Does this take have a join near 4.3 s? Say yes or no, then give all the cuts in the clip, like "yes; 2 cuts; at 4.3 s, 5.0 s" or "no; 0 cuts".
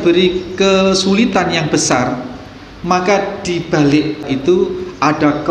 yes; 1 cut; at 4.3 s